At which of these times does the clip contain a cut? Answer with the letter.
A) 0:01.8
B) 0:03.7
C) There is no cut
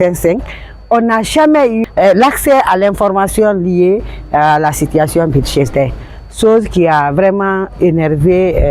A